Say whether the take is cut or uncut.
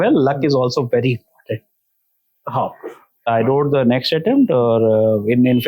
cut